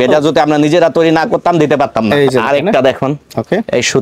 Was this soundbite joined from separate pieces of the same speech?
yes; 1 cut; at 2.1 s

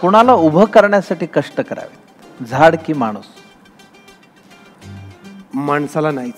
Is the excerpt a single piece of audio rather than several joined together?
yes; 0 cuts

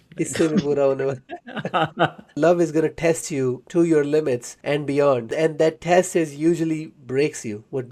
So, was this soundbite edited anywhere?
yes; 4 cuts; at 2.4 s, 3.6 s, 4.5 s, 5.3 s

